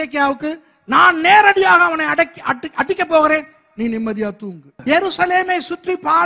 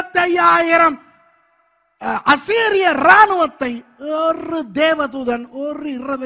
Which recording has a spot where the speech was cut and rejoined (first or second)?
first